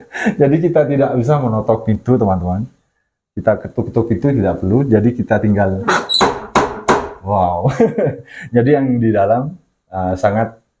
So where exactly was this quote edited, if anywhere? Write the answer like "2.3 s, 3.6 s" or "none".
none